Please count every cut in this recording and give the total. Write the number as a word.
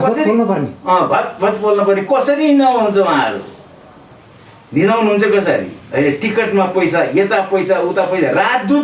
one